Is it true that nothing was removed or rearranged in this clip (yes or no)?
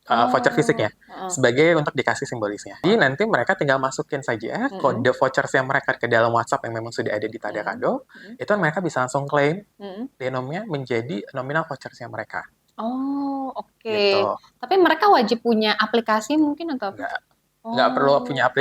no